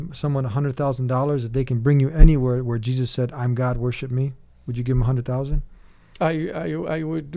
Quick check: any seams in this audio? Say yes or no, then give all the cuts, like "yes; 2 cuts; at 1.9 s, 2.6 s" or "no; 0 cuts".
no; 0 cuts